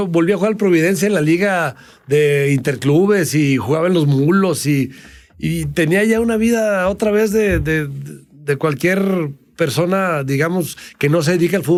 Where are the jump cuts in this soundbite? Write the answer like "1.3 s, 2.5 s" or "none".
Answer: none